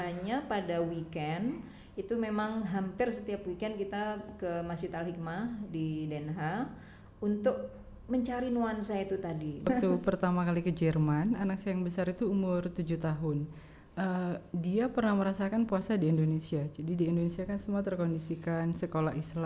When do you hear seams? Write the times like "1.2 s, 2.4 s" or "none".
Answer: 9.7 s